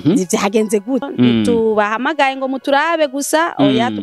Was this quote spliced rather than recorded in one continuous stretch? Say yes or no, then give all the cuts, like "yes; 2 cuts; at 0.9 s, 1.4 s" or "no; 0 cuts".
yes; 1 cut; at 1.1 s